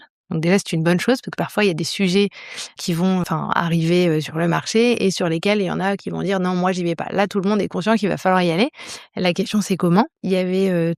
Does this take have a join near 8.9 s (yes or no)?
no